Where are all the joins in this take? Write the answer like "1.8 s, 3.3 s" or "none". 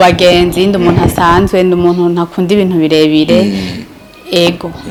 none